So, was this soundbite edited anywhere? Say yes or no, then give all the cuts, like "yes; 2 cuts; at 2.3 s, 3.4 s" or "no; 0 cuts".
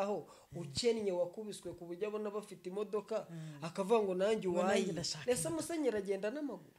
no; 0 cuts